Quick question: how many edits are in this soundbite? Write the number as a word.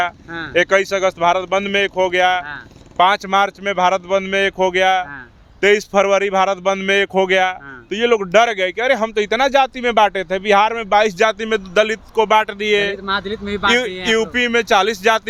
zero